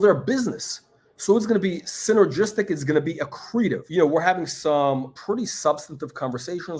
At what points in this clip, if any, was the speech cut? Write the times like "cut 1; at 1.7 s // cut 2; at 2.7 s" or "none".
cut 1; at 3.8 s // cut 2; at 5.1 s